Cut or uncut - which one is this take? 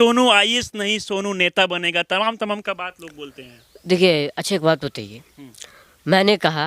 uncut